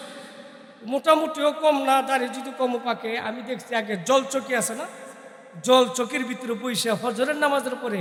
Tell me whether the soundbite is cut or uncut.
uncut